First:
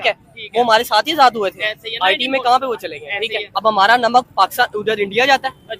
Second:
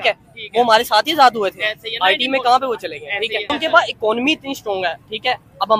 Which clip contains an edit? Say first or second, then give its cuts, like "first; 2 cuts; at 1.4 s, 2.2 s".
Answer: first; 1 cut; at 3.4 s